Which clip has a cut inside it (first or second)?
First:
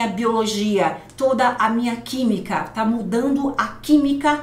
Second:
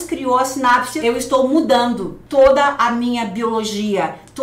second